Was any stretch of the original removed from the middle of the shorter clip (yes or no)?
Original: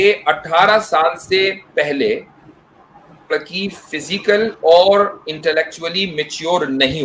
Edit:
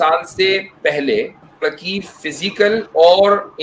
yes